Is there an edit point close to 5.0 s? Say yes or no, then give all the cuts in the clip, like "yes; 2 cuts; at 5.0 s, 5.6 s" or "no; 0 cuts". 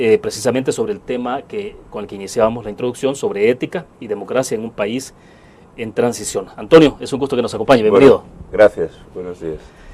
yes; 1 cut; at 5.0 s